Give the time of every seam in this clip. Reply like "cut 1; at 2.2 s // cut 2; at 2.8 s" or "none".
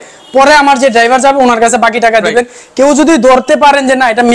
none